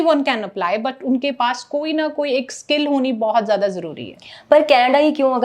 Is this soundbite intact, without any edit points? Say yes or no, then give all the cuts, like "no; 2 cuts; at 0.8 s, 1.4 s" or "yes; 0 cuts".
yes; 0 cuts